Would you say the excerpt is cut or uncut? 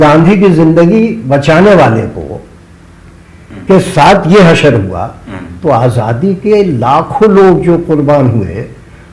uncut